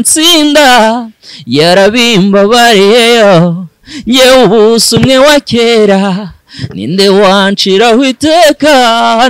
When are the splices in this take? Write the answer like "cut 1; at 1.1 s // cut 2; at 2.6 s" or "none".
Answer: none

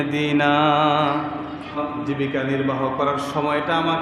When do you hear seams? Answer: cut 1; at 1.8 s

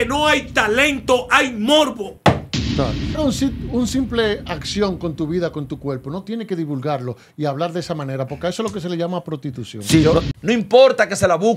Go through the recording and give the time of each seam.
cut 1; at 3.2 s // cut 2; at 10.3 s

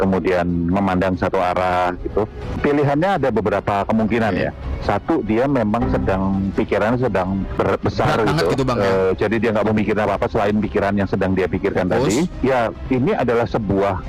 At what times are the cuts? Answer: cut 1; at 2.5 s // cut 2; at 7.5 s

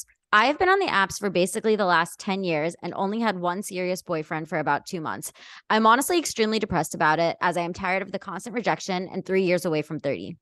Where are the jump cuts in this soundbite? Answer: none

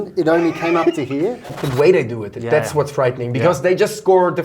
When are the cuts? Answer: cut 1; at 1.5 s

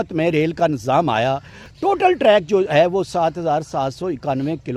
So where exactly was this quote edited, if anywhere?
cut 1; at 1.6 s

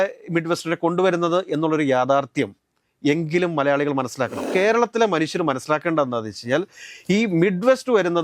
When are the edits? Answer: cut 1; at 4.5 s

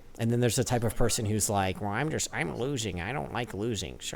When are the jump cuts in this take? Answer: none

